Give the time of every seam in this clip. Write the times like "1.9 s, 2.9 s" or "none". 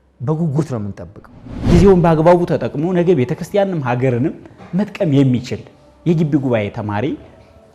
1.7 s